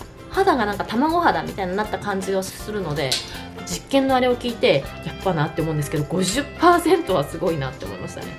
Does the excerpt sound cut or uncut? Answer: uncut